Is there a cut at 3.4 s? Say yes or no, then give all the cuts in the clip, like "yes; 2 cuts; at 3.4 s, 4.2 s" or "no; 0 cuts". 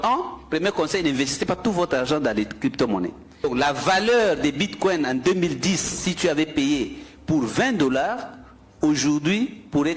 yes; 1 cut; at 3.4 s